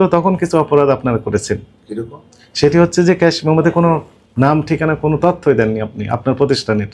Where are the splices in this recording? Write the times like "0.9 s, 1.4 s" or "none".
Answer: none